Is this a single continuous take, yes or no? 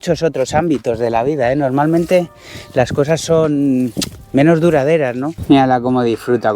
no